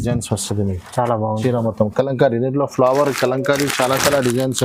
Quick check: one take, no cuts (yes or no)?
yes